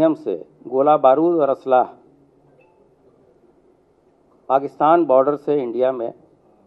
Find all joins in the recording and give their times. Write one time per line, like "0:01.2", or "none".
none